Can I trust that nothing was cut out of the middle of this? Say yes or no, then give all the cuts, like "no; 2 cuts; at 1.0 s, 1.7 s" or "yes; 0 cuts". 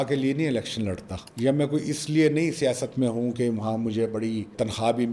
yes; 0 cuts